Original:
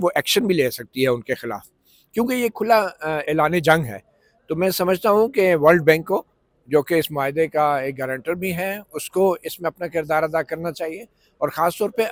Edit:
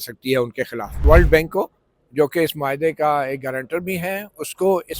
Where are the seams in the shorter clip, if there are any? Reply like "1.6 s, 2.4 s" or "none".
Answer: 1.0 s